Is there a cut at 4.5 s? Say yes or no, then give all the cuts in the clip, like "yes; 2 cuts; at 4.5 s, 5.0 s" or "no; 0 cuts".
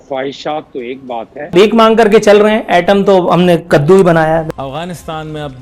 yes; 2 cuts; at 1.5 s, 4.5 s